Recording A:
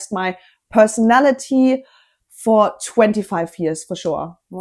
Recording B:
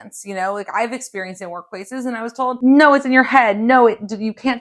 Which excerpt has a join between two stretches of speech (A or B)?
B